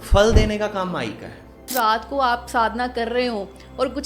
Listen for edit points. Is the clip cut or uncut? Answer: cut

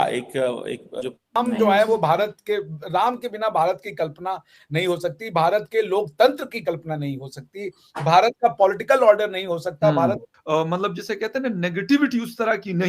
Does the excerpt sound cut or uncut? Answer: cut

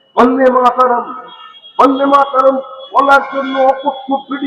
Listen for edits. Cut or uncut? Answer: uncut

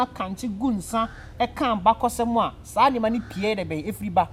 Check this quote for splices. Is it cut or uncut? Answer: uncut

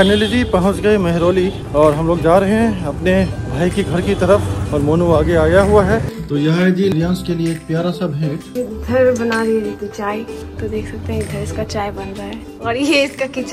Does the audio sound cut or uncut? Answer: cut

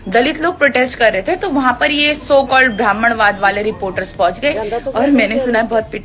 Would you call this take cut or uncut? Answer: uncut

